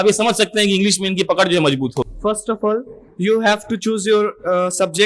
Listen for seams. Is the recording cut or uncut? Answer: cut